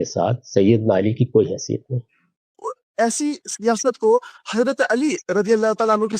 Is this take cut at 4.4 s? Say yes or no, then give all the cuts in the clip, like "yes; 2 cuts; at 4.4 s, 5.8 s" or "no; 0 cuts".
no; 1 cut; at 2.6 s